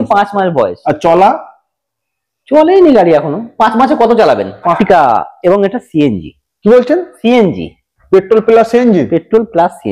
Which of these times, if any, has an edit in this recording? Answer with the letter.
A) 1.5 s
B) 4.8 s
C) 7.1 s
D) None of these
B